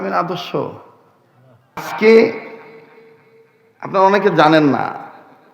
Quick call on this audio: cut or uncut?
cut